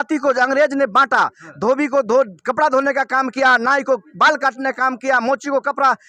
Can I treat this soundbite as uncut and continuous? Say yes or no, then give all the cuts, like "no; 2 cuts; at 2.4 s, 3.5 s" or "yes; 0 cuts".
yes; 0 cuts